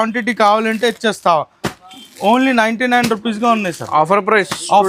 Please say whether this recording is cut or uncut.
uncut